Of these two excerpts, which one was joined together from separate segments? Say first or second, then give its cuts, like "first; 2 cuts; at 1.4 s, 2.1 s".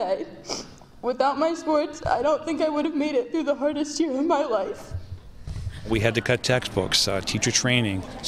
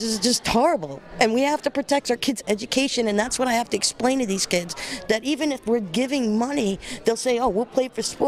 first; 1 cut; at 5.8 s